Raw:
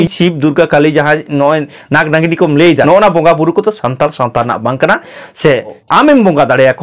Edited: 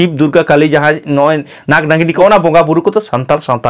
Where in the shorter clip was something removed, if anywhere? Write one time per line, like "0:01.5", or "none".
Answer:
0:02.2